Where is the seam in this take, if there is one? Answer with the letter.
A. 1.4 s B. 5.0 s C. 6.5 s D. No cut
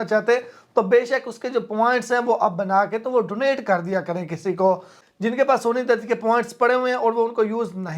B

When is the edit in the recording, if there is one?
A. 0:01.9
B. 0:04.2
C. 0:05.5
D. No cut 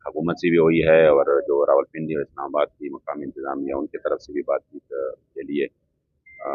D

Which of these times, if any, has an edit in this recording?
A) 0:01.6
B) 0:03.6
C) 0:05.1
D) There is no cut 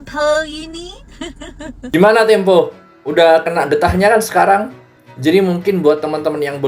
A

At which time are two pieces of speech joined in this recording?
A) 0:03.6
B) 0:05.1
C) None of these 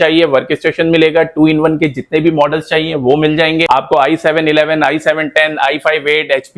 A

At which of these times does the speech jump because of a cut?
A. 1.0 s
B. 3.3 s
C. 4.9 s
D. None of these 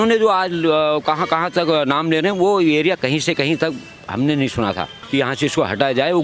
C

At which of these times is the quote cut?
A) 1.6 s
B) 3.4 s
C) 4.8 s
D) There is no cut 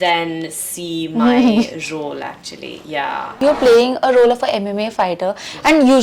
B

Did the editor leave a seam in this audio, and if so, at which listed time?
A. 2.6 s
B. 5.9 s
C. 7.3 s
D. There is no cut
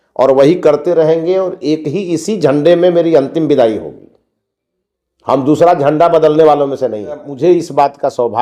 C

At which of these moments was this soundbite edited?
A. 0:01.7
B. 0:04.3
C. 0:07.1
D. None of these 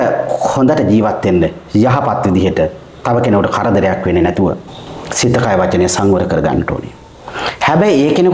D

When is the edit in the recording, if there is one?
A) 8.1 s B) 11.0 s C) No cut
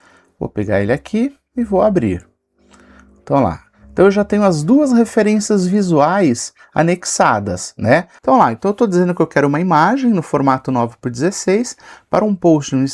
A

